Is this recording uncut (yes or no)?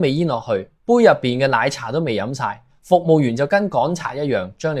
yes